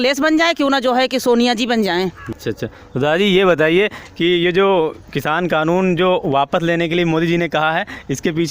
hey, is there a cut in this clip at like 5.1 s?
no; 1 cut; at 2.2 s

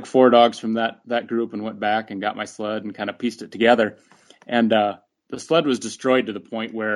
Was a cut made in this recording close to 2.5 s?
no; 1 cut; at 1.0 s

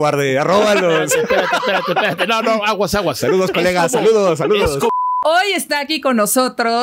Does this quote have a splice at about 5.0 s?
yes; 1 cut; at 5.0 s

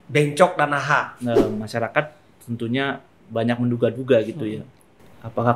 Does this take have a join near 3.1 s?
no; 1 cut; at 1.1 s

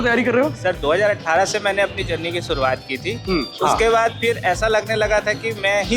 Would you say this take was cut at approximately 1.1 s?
no; 1 cut; at 3.5 s

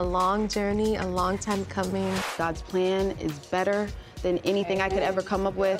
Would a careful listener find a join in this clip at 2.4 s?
yes; 1 cut; at 2.4 s

